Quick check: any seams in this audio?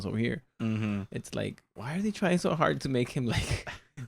no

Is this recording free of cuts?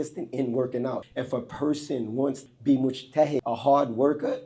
no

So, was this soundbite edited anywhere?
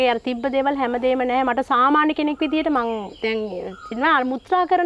no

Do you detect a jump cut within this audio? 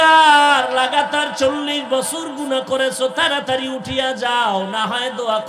no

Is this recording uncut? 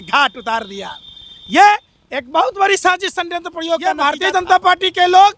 no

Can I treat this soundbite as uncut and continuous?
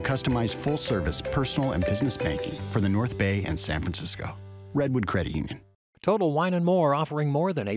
no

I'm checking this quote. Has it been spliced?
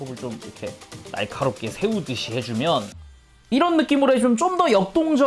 yes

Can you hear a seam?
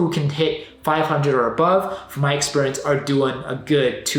no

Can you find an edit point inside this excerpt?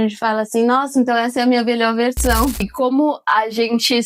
yes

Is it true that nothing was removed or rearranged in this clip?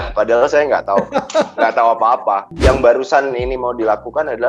no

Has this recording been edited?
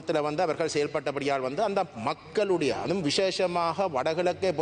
no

